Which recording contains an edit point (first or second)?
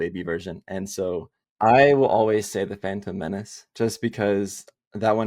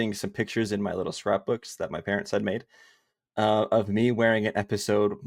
first